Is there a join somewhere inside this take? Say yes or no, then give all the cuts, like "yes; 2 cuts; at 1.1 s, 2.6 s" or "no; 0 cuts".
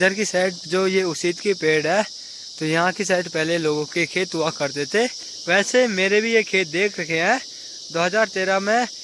no; 0 cuts